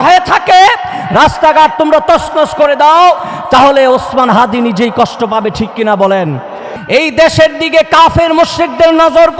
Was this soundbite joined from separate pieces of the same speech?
yes; 1 cut; at 6.7 s

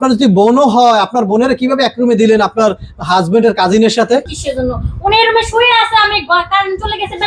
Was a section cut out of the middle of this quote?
yes; 1 cut; at 4.4 s

